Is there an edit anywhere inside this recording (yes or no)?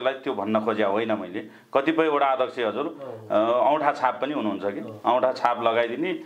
no